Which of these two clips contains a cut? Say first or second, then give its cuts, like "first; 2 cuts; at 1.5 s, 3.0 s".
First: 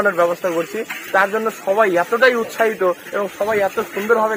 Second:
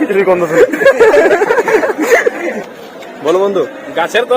second; 1 cut; at 2.6 s